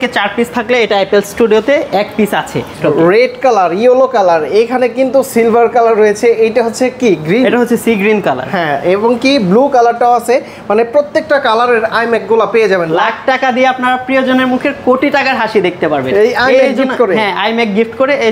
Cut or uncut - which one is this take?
cut